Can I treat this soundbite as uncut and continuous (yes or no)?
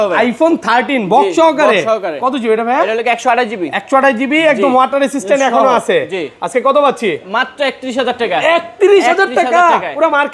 yes